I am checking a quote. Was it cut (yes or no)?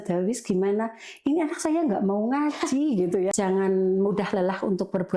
yes